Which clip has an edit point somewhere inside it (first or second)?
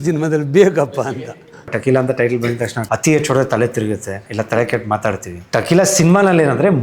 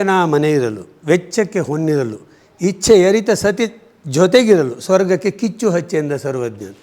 first